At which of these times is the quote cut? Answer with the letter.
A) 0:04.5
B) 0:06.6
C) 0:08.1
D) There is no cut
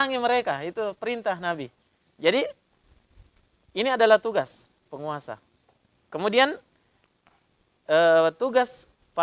D